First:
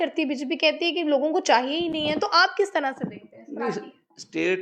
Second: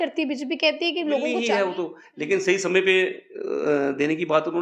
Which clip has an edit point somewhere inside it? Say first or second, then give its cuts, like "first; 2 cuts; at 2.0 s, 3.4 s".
second; 1 cut; at 1.4 s